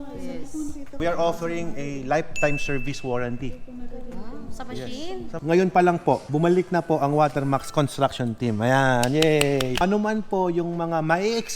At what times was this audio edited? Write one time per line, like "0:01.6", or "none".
0:01.0
0:05.3
0:09.8